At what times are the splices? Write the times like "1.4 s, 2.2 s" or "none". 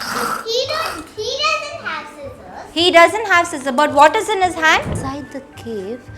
5.0 s